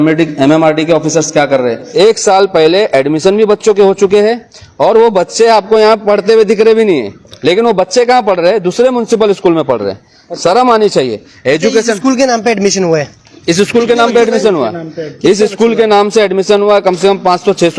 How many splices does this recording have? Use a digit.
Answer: 1